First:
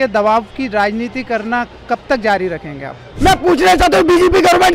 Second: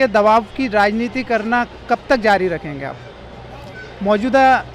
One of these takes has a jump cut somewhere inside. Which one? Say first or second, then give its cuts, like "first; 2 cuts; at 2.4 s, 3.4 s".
first; 1 cut; at 3.1 s